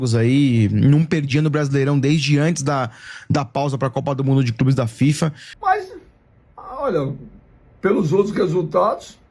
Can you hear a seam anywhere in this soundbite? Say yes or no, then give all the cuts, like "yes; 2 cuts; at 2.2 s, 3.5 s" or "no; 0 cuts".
yes; 1 cut; at 5.5 s